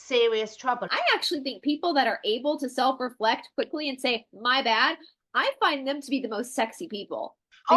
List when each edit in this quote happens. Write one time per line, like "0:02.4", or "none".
0:00.9